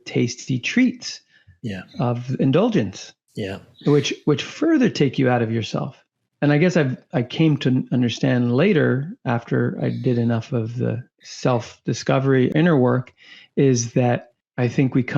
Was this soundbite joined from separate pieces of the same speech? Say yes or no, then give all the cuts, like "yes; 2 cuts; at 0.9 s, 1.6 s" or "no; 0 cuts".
no; 0 cuts